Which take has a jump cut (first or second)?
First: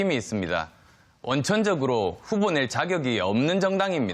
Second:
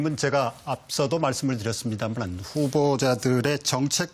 second